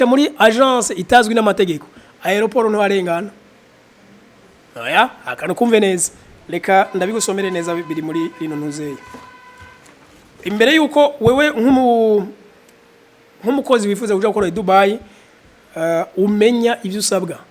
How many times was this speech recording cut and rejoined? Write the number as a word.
one